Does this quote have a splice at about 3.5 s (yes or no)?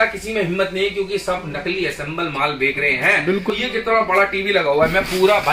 yes